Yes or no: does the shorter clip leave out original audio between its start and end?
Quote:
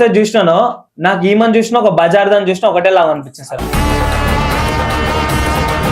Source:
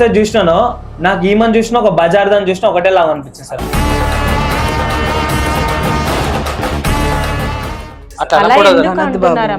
no